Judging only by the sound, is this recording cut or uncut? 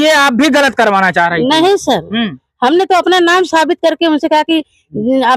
uncut